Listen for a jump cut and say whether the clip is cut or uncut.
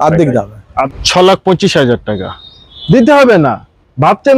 cut